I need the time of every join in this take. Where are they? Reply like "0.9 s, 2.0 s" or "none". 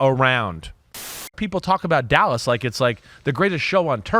1.2 s